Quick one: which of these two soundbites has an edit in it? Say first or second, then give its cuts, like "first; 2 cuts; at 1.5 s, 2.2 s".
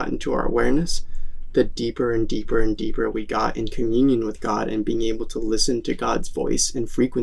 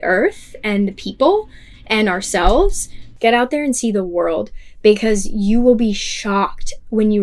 second; 1 cut; at 3.0 s